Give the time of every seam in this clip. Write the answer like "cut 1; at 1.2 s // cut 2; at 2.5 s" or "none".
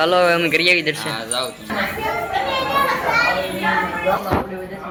none